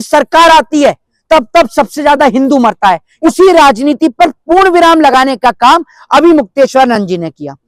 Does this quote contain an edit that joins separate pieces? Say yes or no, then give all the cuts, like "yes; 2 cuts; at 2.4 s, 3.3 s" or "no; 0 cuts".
yes; 1 cut; at 3.1 s